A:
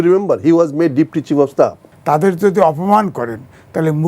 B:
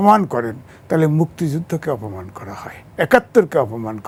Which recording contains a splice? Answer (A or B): A